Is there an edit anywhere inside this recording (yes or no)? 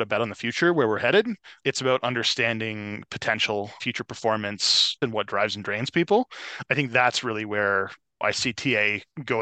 yes